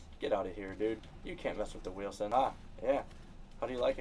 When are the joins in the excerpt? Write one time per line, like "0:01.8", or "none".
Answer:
0:02.3